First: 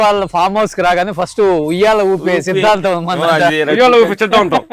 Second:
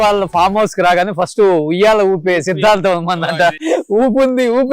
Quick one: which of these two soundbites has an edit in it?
second; 1 cut; at 3.5 s

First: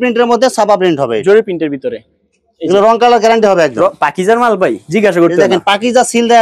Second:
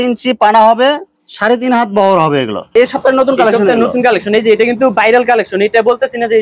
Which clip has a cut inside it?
second; 1 cut; at 2.7 s

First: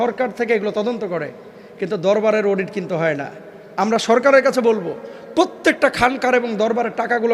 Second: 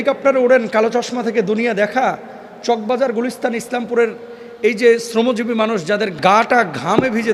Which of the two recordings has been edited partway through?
second; 1 cut; at 6.1 s

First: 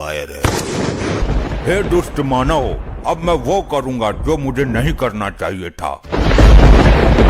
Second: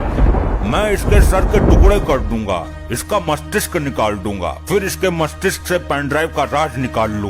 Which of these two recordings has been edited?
first; 2 cuts; at 1.2 s, 6.0 s

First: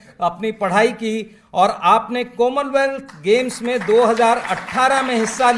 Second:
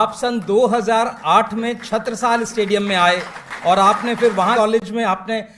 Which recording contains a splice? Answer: second; 1 cut; at 4.5 s

